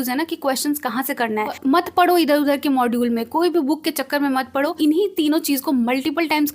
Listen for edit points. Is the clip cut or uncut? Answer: cut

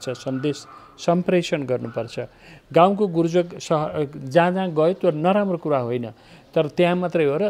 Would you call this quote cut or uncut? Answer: uncut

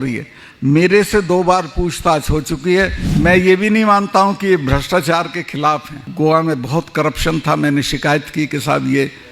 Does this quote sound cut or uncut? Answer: cut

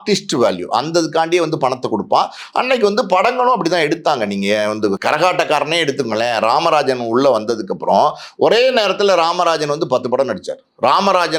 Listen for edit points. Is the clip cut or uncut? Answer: uncut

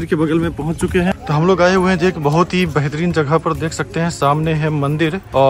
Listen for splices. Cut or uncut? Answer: cut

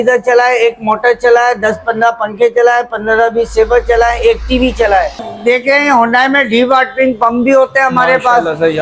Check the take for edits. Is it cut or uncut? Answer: cut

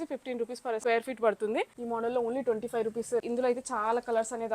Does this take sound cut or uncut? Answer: cut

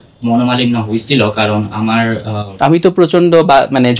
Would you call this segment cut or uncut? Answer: uncut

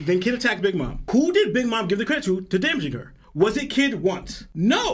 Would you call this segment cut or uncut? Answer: cut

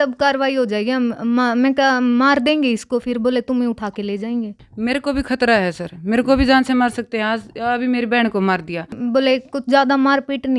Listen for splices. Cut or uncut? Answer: cut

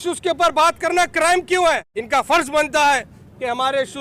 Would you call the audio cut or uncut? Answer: cut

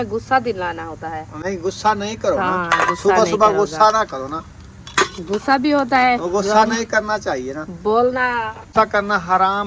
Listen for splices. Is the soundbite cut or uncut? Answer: cut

